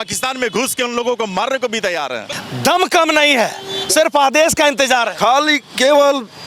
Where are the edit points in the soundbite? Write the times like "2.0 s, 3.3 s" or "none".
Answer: 2.3 s

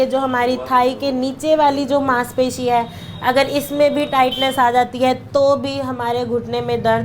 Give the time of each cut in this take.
none

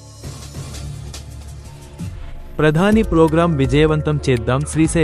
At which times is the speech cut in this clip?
0.8 s, 1.7 s

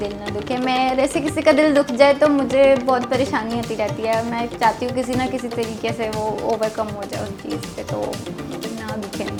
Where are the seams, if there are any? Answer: none

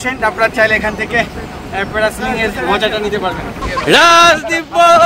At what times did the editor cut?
3.5 s

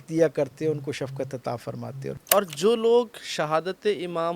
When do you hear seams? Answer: 2.2 s

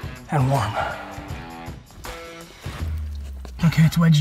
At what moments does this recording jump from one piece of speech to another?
1.0 s

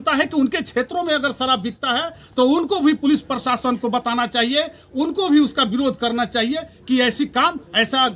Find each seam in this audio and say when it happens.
none

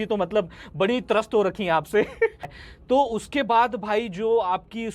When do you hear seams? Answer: 2.5 s

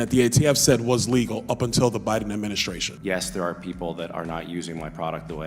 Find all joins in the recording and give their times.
2.9 s

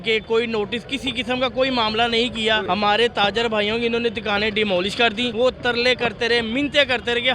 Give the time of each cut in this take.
2.6 s, 5.3 s

